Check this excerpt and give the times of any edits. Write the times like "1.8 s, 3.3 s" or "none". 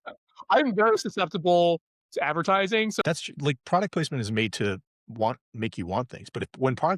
3.0 s

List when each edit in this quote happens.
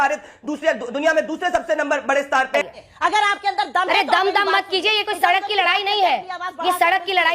2.7 s

